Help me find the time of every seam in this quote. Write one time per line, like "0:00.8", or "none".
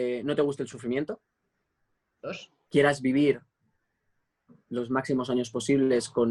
0:02.5